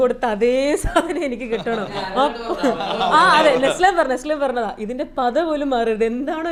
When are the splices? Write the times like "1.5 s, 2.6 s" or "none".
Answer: none